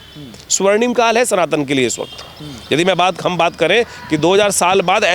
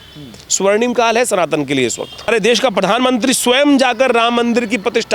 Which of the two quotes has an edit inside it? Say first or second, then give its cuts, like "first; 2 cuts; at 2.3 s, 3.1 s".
second; 1 cut; at 2.3 s